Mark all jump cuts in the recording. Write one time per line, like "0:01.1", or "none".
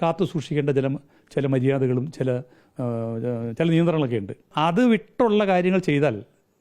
0:04.5